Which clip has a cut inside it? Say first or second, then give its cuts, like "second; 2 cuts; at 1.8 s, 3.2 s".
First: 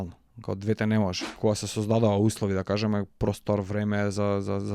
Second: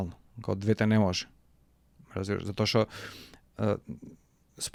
first; 1 cut; at 1.3 s